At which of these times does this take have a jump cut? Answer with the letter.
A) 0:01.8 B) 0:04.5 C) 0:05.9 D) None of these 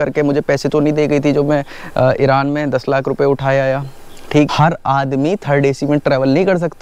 B